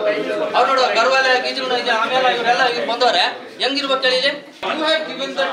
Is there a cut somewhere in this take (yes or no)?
yes